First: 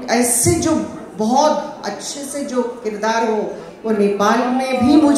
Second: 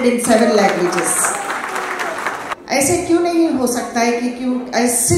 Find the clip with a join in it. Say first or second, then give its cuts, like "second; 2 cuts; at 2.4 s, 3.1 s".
second; 1 cut; at 2.5 s